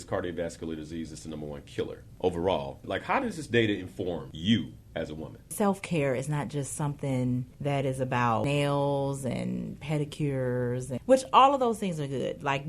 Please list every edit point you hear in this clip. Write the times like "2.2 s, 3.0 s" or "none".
2.0 s, 2.9 s, 4.3 s, 5.5 s, 7.5 s, 8.4 s, 10.9 s